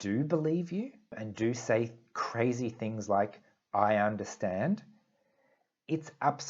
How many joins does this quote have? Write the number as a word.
one